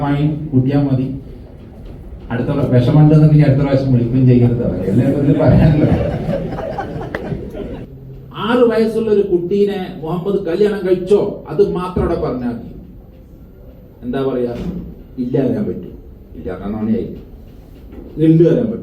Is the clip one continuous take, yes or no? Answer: no